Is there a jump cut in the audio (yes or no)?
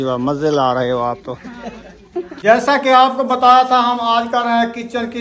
yes